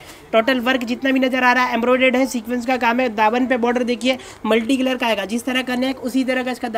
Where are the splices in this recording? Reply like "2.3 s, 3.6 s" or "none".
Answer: none